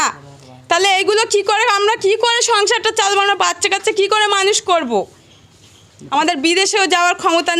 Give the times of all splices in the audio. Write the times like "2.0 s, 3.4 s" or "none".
6.0 s